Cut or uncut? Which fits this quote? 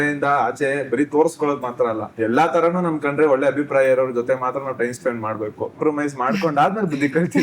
cut